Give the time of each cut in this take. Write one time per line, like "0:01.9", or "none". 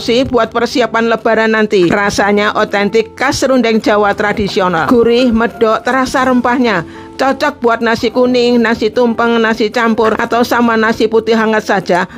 0:01.9
0:04.9
0:10.2